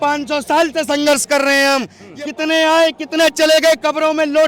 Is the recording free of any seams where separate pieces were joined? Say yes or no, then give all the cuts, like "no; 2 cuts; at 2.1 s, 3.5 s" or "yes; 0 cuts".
no; 1 cut; at 2.0 s